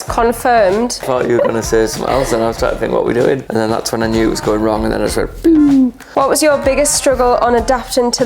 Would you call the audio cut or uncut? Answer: cut